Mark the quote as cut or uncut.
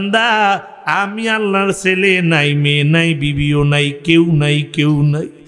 uncut